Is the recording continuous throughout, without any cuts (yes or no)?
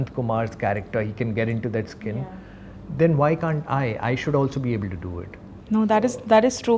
yes